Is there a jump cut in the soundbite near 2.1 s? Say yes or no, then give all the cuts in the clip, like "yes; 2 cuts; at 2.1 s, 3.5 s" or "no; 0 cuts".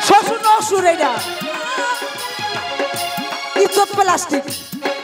yes; 1 cut; at 2.1 s